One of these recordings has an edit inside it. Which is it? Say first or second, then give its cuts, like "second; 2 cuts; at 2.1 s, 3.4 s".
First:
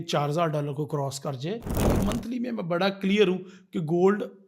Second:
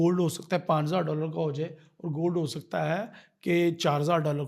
first; 1 cut; at 1.7 s